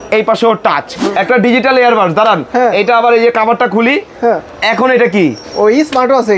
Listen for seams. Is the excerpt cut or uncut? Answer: cut